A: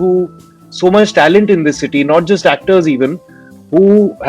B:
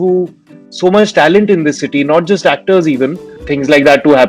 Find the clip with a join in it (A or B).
B